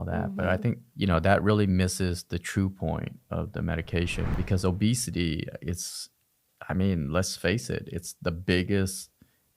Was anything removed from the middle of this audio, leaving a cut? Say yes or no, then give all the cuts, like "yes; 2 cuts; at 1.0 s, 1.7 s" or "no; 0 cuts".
yes; 2 cuts; at 0.9 s, 4.3 s